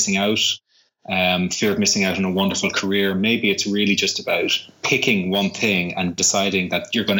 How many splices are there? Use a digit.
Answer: 1